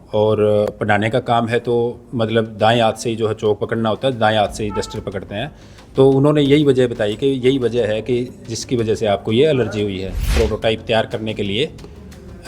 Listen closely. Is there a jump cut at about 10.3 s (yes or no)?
yes